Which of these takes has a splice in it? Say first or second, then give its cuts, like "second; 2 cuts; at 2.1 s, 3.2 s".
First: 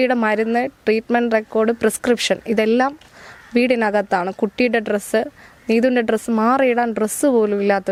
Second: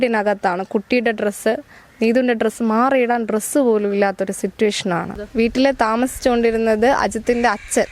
second; 1 cut; at 5.2 s